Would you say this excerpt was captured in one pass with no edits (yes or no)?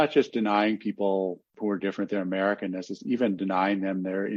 yes